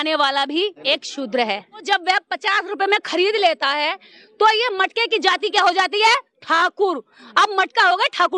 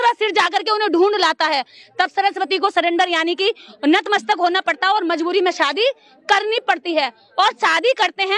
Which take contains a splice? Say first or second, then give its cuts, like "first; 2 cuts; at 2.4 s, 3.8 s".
first; 2 cuts; at 0.8 s, 1.8 s